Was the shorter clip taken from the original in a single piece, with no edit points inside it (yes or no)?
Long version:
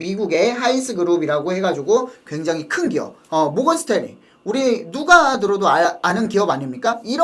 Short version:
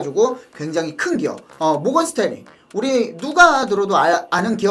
yes